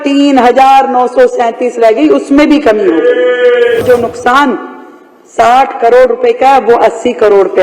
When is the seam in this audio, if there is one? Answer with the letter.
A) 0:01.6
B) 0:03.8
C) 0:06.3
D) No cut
B